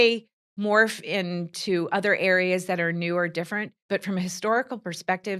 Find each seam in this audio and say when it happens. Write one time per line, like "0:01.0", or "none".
0:03.7